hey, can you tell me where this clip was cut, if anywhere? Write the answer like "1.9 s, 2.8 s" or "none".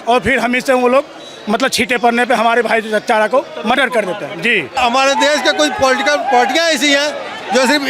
4.8 s